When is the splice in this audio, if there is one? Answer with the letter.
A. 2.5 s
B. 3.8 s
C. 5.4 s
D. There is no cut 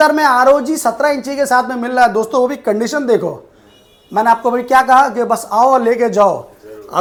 D